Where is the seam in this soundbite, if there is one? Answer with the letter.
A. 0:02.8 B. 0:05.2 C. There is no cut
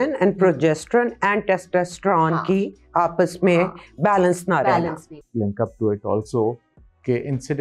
B